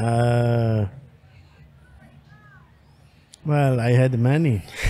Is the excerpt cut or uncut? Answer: uncut